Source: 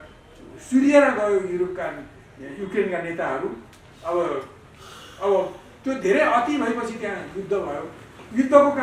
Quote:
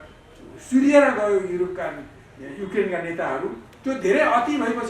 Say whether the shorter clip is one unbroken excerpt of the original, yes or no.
no